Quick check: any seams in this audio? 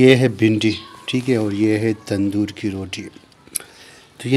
no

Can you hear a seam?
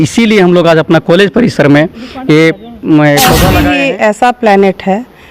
yes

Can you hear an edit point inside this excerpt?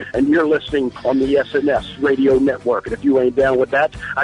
yes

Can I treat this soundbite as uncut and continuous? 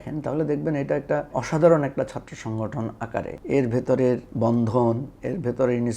no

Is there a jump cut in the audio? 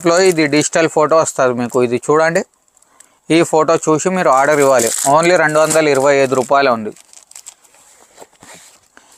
no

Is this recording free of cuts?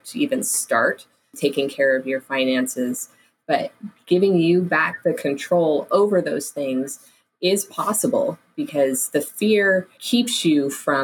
no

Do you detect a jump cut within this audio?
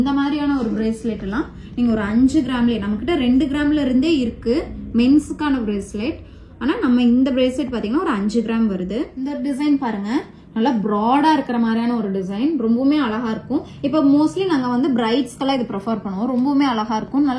yes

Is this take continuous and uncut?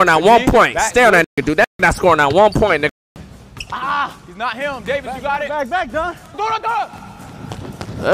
yes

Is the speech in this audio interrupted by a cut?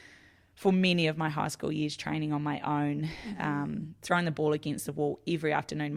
no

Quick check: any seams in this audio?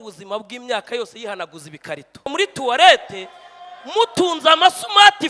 yes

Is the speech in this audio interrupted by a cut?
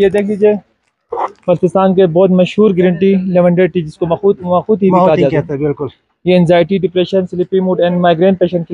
no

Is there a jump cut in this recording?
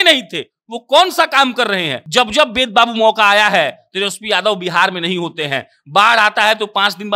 yes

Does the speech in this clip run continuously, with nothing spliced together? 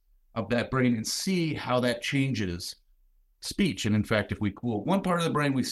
yes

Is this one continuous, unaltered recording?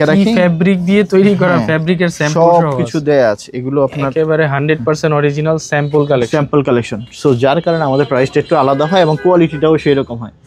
yes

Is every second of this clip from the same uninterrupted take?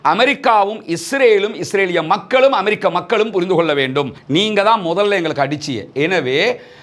no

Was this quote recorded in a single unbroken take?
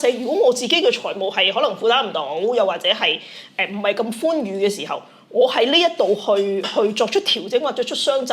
yes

